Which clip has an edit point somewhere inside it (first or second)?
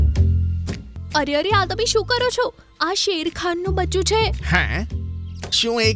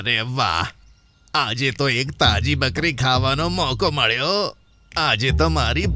first